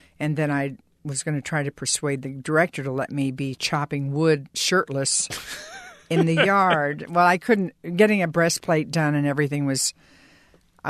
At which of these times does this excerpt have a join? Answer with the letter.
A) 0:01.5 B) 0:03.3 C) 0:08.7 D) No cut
D